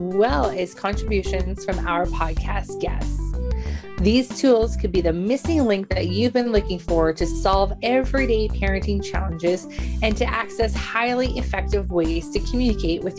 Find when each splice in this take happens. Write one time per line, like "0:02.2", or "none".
none